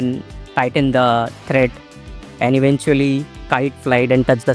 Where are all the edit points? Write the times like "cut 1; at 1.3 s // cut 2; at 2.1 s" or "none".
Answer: cut 1; at 3.3 s